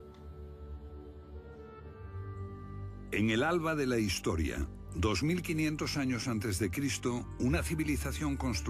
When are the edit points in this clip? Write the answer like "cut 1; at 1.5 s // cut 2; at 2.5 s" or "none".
cut 1; at 1.5 s